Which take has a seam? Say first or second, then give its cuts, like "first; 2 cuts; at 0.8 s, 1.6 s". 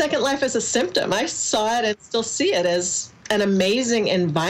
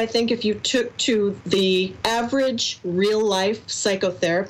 second; 1 cut; at 1.7 s